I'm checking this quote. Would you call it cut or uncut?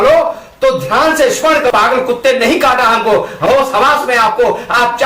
cut